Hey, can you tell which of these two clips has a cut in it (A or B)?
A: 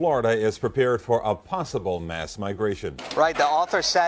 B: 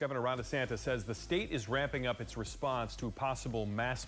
A